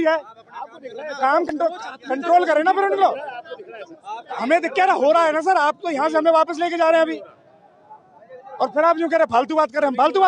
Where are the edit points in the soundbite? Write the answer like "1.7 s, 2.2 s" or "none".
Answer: none